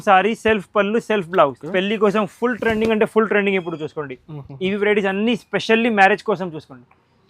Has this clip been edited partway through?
yes; 1 cut; at 1.6 s

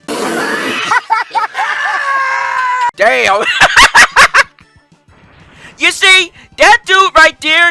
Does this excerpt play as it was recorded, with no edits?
no; 1 cut; at 2.9 s

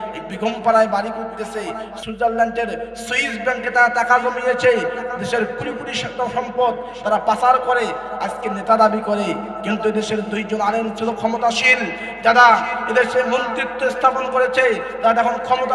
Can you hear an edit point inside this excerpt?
yes; 1 cut; at 2.0 s

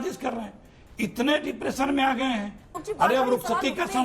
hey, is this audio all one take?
no; 1 cut; at 2.8 s

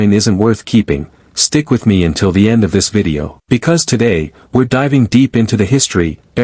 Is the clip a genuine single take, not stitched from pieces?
no; 1 cut; at 3.3 s

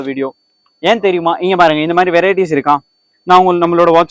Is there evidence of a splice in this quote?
no; 0 cuts

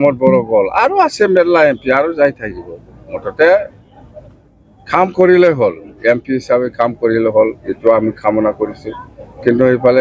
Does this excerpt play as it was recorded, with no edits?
yes; 0 cuts

